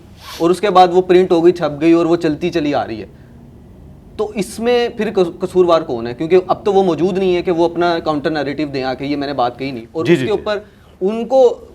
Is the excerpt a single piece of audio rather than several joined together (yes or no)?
yes